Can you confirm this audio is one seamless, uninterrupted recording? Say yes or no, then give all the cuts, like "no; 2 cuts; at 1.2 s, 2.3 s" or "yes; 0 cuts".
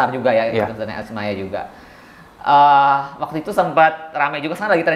yes; 0 cuts